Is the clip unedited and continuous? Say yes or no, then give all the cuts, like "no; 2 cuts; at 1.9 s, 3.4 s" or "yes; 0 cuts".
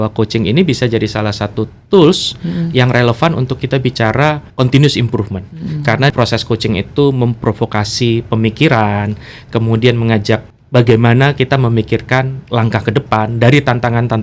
no; 3 cuts; at 4.5 s, 6.1 s, 10.5 s